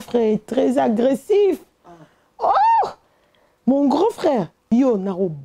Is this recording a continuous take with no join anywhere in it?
no; 1 cut; at 4.5 s

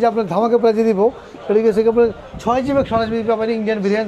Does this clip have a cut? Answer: no; 0 cuts

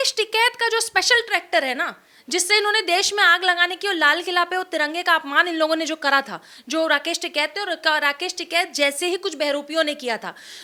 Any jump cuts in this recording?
no; 0 cuts

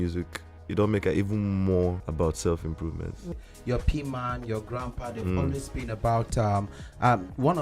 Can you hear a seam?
yes; 2 cuts; at 2.0 s, 3.3 s

